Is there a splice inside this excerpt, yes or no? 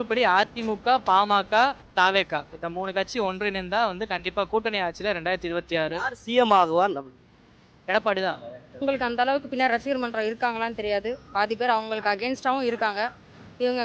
yes